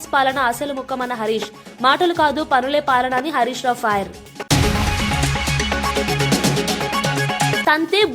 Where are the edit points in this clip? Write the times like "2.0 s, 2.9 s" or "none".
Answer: 4.3 s